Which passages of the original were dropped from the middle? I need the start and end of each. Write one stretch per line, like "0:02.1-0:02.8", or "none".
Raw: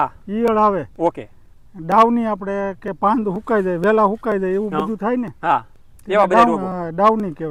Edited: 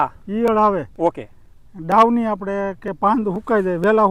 none